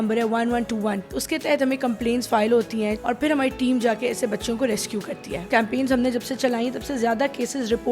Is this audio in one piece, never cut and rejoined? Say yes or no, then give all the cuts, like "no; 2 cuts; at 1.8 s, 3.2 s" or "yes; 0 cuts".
no; 3 cuts; at 1.1 s, 3.0 s, 5.5 s